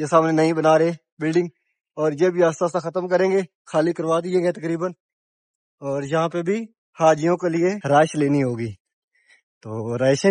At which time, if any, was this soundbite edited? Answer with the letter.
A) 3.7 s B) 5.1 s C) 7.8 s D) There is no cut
C